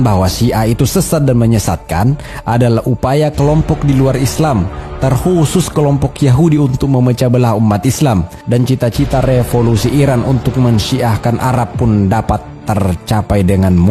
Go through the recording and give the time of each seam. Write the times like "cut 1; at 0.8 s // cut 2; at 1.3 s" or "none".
cut 1; at 8.3 s